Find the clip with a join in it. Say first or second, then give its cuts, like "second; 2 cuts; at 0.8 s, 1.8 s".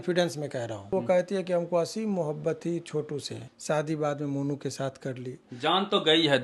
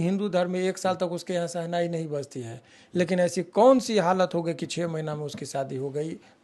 first; 3 cuts; at 0.9 s, 3.4 s, 5.4 s